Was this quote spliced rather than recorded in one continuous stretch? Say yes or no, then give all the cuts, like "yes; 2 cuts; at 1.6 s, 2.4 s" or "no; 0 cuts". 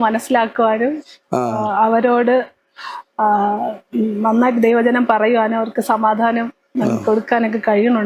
no; 0 cuts